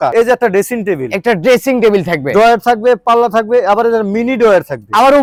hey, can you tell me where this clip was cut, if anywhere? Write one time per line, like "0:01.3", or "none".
none